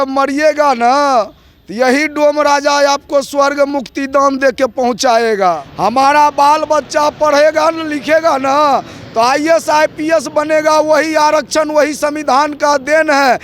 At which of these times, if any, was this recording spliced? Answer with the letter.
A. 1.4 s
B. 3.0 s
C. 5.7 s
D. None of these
C